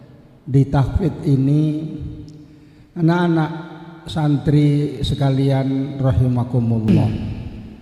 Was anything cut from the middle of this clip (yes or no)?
yes